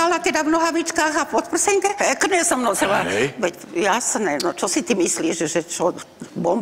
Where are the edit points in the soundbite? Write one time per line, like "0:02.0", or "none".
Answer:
0:02.0